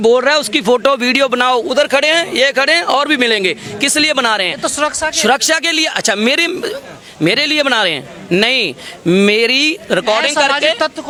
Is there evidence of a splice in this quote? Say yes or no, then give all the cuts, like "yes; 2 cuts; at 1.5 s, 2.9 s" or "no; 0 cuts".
no; 0 cuts